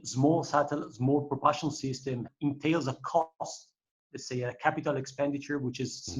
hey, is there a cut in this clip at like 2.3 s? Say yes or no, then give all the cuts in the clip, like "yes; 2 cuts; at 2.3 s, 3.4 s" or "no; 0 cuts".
yes; 1 cut; at 2.3 s